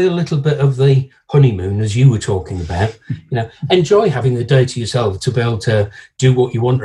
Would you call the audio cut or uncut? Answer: cut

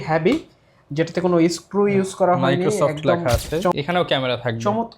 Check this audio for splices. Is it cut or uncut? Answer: cut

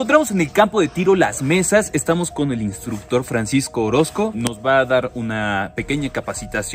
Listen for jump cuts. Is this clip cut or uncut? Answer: uncut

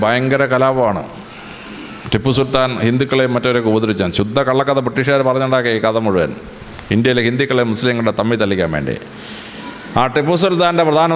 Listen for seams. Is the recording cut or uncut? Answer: uncut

